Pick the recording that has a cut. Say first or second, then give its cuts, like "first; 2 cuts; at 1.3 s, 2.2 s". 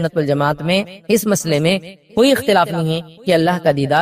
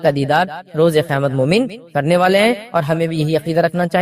first; 1 cut; at 0.9 s